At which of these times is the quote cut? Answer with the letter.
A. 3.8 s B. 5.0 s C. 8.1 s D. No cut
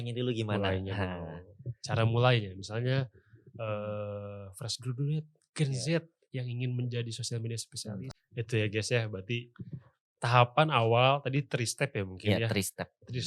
C